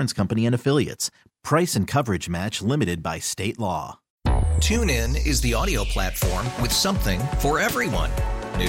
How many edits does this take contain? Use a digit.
1